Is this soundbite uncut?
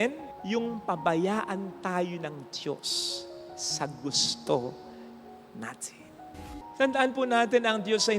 no; 1 cut; at 6.5 s

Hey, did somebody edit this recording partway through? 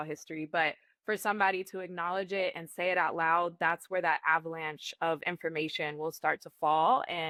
no; 0 cuts

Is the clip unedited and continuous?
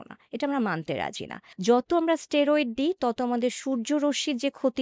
no; 1 cut; at 1.5 s

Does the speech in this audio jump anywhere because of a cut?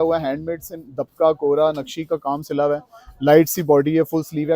no; 0 cuts

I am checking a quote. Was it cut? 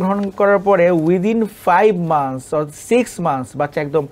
no; 0 cuts

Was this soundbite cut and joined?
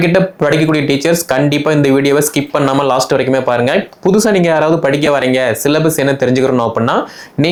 no; 0 cuts

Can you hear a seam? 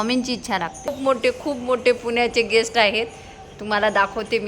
yes; 1 cut; at 0.9 s

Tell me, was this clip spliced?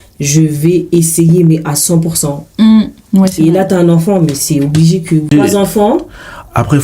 yes; 1 cut; at 5.3 s

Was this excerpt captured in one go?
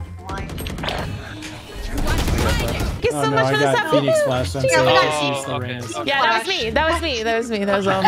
no; 1 cut; at 2.9 s

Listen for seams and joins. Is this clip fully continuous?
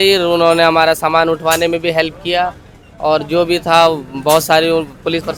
yes; 0 cuts

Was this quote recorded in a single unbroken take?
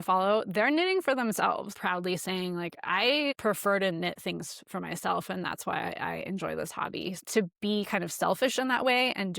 no; 3 cuts; at 1.7 s, 3.4 s, 7.2 s

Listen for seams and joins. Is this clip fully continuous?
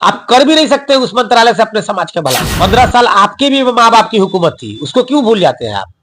no; 1 cut; at 2.5 s

